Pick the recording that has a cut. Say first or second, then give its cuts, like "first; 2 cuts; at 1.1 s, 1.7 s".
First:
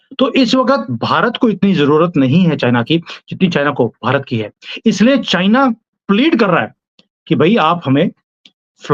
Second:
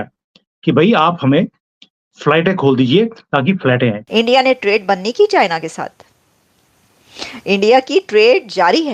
second; 1 cut; at 4.0 s